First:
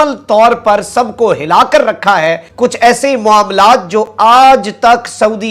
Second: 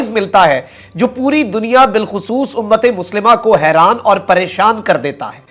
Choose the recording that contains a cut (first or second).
first